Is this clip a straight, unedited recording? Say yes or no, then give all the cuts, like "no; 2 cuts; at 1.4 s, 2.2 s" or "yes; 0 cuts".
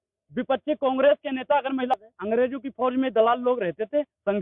no; 1 cut; at 1.9 s